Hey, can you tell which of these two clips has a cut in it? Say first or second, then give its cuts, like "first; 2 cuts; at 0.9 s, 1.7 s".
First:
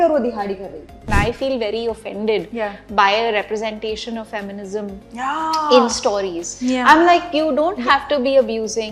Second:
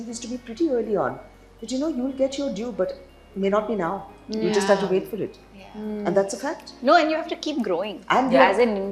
first; 1 cut; at 1.1 s